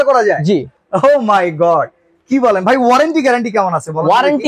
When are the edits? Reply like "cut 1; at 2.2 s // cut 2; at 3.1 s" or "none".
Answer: none